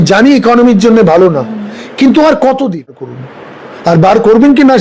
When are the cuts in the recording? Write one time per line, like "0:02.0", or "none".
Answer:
0:03.1